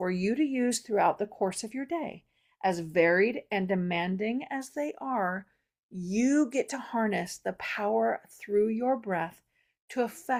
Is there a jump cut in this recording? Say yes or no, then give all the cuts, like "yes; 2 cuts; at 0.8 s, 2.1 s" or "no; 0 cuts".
no; 0 cuts